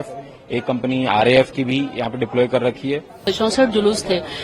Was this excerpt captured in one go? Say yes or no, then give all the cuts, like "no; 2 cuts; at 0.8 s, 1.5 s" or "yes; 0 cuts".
no; 1 cut; at 3.2 s